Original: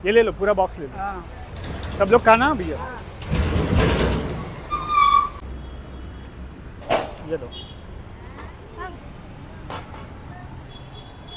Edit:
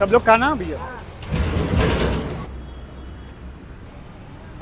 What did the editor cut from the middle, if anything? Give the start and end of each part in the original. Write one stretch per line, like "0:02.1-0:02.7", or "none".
0:04.5-0:05.5
0:06.8-0:09.0